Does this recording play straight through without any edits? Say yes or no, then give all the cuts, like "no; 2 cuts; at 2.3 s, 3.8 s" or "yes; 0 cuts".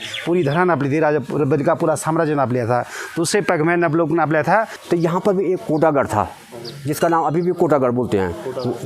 no; 1 cut; at 4.8 s